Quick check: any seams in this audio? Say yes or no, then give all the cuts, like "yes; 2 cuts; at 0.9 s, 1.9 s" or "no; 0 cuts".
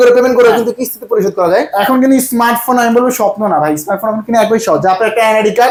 no; 0 cuts